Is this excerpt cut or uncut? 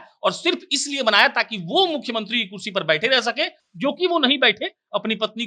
uncut